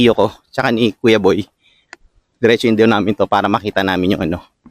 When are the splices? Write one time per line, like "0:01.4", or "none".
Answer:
none